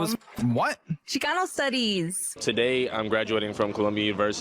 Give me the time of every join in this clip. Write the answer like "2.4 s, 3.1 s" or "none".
2.3 s